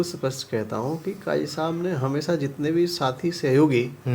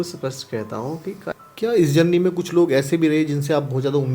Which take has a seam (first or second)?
second